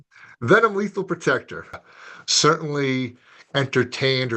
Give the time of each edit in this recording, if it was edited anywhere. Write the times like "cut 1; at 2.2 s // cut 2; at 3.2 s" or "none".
cut 1; at 1.8 s